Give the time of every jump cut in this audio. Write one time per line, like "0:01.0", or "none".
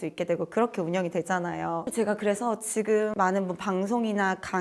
0:01.8